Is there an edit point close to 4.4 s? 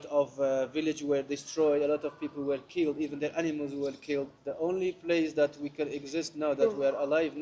yes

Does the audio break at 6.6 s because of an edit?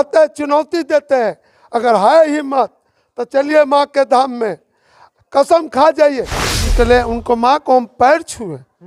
yes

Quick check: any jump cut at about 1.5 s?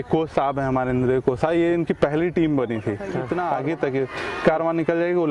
no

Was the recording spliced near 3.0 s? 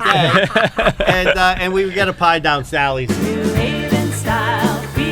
yes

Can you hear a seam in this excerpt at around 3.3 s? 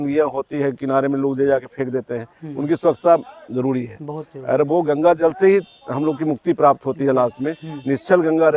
no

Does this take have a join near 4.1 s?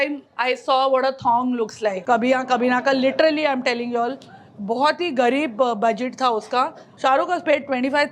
no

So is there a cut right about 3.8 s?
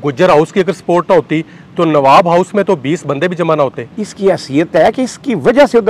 yes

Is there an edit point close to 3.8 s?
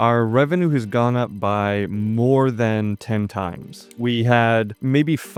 no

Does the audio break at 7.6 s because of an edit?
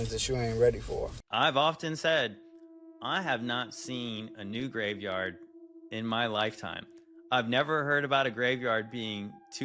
no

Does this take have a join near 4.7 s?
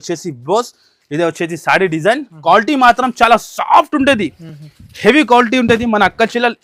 no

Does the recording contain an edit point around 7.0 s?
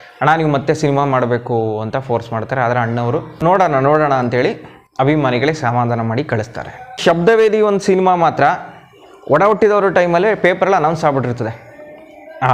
yes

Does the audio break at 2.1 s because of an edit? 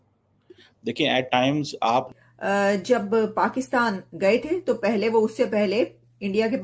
yes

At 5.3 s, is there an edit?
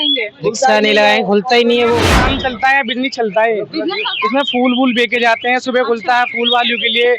no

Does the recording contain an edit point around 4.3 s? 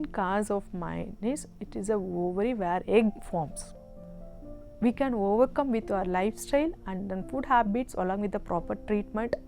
yes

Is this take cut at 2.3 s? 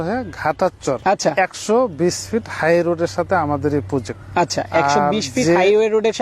no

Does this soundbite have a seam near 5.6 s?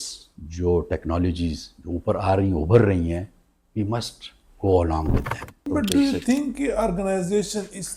yes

